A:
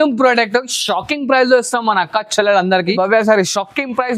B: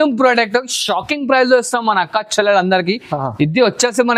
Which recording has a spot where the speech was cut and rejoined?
A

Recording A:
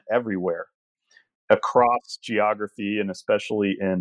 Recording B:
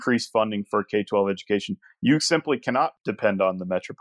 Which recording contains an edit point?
B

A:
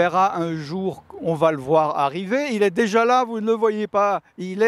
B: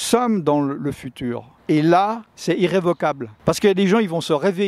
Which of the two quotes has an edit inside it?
B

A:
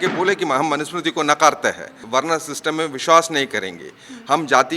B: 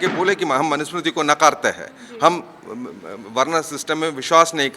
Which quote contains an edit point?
A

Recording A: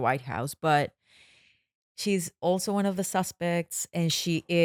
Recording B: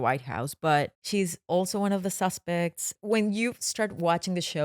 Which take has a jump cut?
B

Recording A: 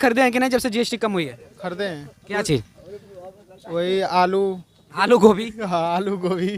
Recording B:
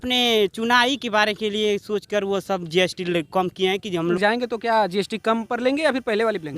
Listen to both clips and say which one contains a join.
B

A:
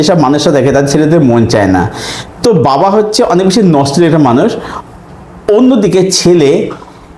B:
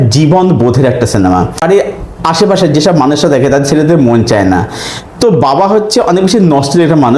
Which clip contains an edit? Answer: B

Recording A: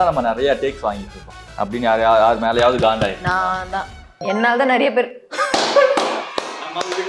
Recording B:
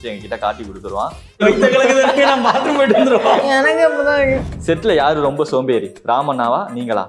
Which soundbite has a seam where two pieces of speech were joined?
B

